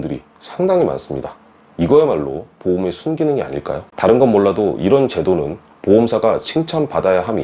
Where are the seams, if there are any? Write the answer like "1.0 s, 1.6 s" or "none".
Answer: 3.8 s